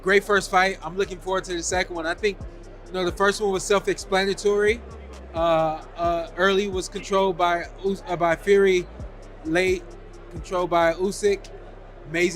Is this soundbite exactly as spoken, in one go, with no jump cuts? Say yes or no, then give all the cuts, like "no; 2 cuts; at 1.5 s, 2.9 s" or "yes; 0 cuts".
yes; 0 cuts